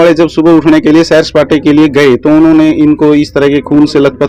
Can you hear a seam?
no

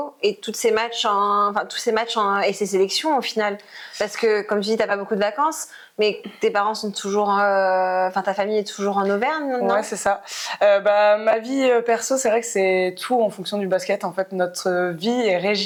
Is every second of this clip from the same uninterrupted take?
yes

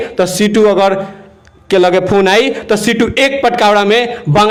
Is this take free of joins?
yes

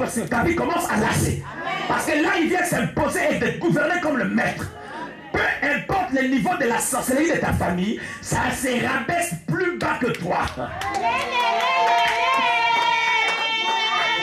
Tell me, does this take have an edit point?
no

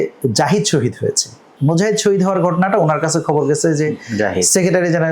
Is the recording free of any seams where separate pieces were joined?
no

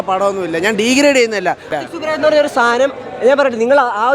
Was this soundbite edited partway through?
yes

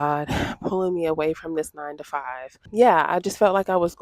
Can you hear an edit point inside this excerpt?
yes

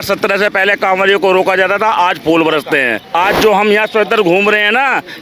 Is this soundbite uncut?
no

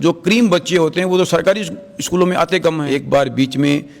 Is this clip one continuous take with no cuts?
no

